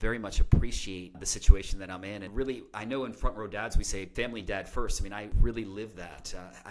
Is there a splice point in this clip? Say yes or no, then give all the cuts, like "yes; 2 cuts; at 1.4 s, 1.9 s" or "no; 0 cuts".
yes; 4 cuts; at 1.2 s, 2.3 s, 4.1 s, 5.3 s